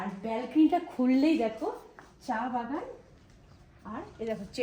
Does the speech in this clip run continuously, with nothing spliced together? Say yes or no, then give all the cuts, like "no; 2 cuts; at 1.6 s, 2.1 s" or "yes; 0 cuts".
yes; 0 cuts